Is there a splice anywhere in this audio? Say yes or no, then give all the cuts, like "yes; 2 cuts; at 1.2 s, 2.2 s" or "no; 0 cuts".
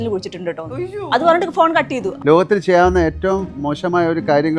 yes; 1 cut; at 2.2 s